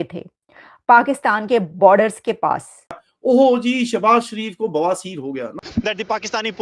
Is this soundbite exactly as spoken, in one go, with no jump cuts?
yes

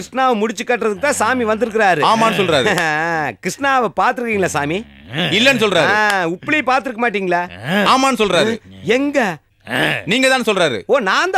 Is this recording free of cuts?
yes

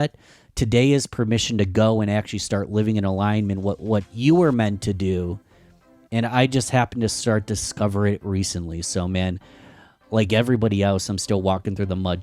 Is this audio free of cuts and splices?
no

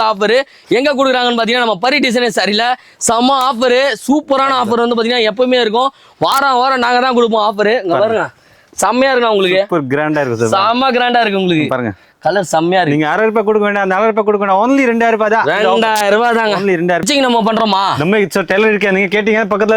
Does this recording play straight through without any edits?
no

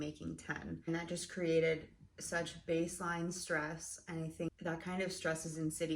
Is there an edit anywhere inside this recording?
yes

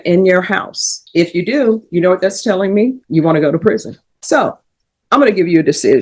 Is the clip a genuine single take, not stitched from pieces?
yes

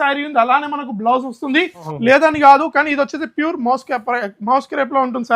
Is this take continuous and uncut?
no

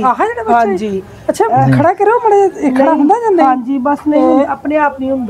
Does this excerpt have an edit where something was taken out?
no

